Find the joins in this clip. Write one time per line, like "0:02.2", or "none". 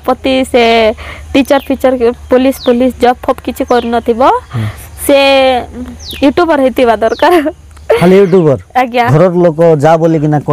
0:09.0